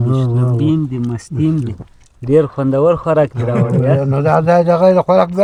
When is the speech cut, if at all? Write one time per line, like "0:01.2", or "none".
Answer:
none